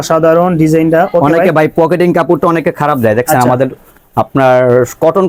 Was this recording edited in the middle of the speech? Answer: no; 0 cuts

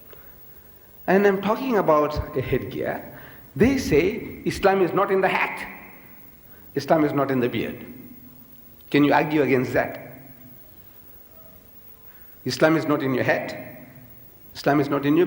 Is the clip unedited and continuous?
yes; 0 cuts

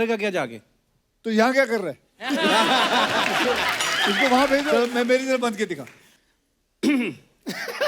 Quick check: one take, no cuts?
no; 1 cut; at 4.7 s

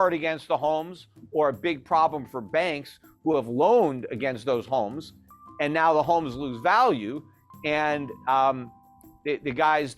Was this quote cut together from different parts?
no; 0 cuts

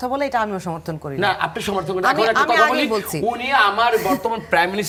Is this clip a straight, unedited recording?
yes; 0 cuts

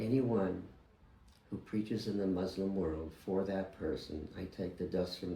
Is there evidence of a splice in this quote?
no; 0 cuts

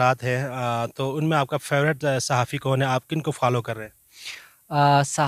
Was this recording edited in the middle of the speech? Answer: no; 0 cuts

